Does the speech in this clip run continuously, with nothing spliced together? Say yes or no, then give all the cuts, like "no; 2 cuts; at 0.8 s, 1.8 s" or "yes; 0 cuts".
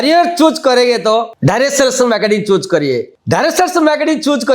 no; 2 cuts; at 1.3 s, 3.1 s